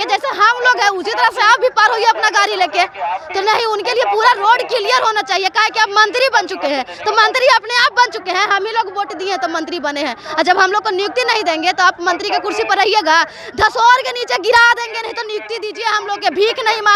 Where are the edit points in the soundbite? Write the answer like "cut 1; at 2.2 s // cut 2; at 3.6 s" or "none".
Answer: none